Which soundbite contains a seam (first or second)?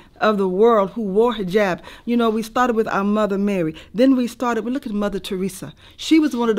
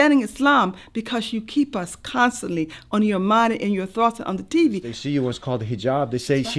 second